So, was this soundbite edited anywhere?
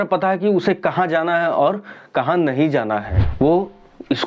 yes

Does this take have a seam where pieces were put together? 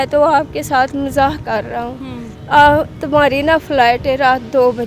no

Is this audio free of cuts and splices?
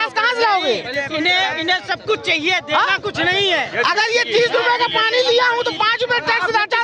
yes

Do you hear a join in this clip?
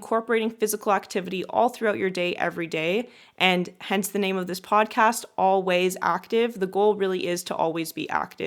no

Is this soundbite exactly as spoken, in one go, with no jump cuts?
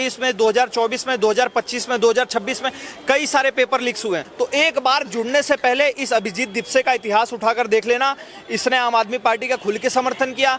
no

